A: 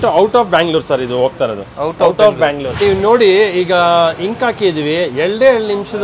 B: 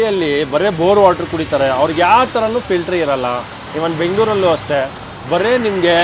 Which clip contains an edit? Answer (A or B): A